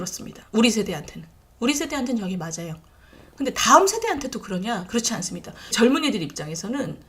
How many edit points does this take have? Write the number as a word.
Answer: one